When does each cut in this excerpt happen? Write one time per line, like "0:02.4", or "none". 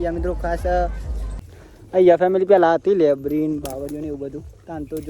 0:01.4